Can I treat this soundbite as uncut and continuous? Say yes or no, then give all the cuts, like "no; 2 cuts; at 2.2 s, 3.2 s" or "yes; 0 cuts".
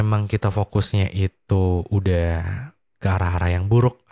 yes; 0 cuts